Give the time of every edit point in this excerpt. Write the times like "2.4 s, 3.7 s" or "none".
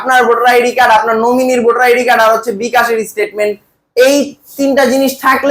none